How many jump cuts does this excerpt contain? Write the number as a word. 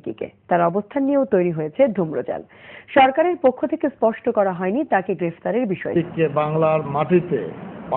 zero